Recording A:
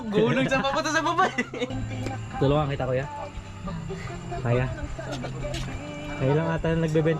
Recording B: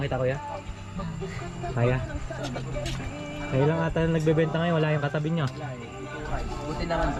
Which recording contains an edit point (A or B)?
A